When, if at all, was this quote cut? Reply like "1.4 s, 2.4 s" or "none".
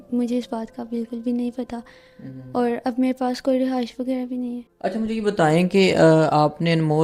none

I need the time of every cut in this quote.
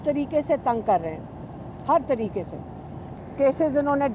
3.1 s

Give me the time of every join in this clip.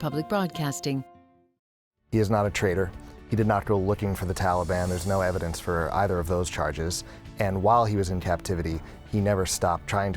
1.9 s

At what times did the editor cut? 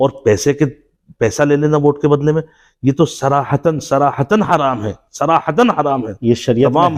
none

